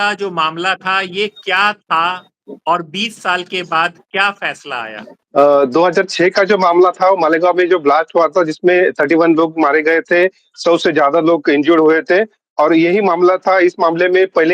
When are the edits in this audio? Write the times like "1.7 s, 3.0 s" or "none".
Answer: 5.1 s